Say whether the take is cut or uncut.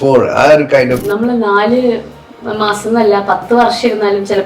cut